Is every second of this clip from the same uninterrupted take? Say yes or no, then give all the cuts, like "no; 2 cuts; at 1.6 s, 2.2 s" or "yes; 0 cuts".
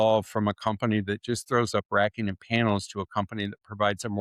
yes; 0 cuts